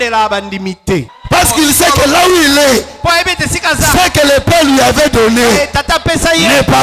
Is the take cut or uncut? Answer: cut